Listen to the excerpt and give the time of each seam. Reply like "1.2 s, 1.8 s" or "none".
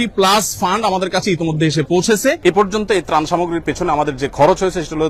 2.4 s